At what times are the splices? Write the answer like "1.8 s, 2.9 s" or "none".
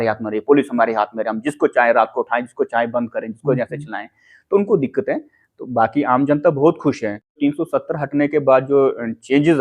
7.4 s